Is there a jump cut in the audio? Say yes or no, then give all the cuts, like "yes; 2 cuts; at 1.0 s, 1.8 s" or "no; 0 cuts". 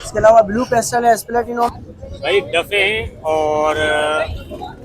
yes; 1 cut; at 1.7 s